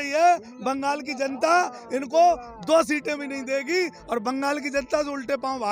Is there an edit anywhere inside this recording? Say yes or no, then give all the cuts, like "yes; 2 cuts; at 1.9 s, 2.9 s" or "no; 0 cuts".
no; 0 cuts